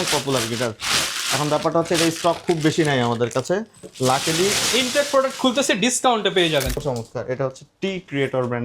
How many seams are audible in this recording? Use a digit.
1